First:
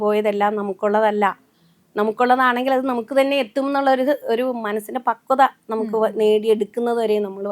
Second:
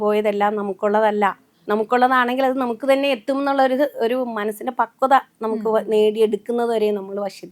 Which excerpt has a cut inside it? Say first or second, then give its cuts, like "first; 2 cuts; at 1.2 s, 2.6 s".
second; 1 cut; at 1.5 s